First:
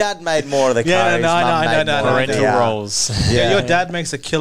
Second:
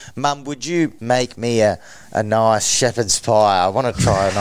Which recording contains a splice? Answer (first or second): second